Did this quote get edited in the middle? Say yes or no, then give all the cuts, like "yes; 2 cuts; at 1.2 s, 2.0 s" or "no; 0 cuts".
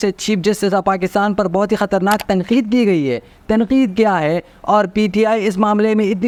no; 0 cuts